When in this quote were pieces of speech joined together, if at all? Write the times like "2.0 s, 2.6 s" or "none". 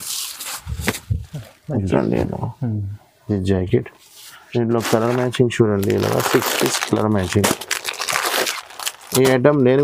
1.9 s